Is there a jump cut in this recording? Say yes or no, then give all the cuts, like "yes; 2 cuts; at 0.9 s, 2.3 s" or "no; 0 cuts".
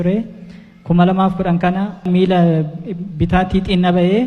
yes; 1 cut; at 2.1 s